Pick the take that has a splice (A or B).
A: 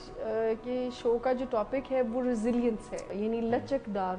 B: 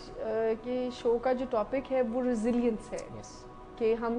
A